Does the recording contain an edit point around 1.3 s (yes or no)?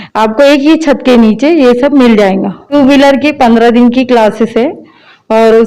no